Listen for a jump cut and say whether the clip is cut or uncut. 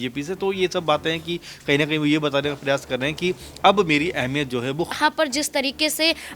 cut